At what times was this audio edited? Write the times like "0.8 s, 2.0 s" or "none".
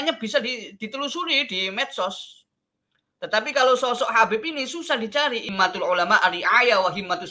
5.5 s

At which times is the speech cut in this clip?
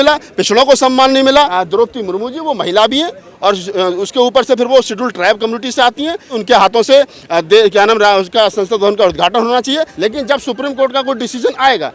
1.6 s, 6.4 s, 9.9 s

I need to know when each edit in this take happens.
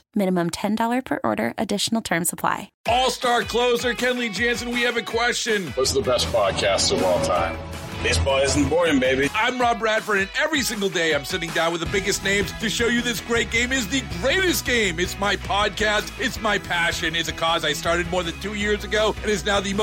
2.7 s

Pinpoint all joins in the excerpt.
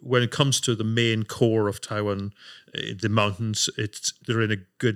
4.1 s

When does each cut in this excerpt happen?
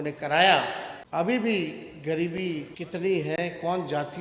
0.9 s, 2.7 s

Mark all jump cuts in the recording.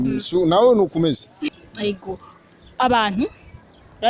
1.5 s

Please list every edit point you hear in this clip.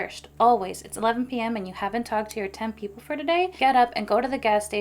3.5 s

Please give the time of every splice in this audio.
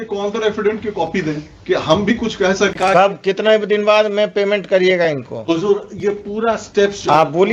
2.7 s

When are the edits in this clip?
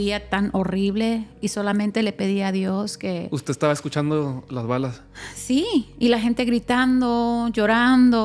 none

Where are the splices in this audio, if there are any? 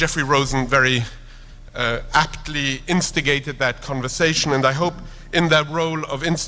2.8 s

